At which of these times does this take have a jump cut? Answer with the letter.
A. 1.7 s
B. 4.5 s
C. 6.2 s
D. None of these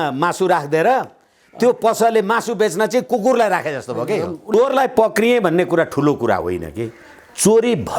B